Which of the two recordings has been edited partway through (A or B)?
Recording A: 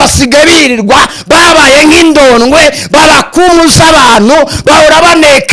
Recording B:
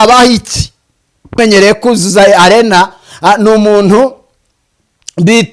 B